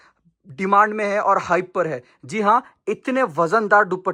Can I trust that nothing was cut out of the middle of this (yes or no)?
yes